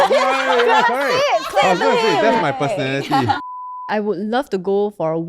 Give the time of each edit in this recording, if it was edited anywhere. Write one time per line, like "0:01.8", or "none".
0:03.8